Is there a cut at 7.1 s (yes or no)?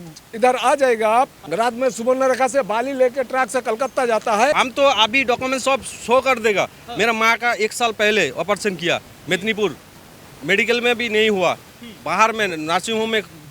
no